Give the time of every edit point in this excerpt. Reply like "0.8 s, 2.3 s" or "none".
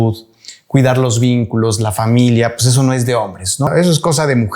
3.7 s